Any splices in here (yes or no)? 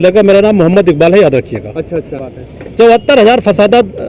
yes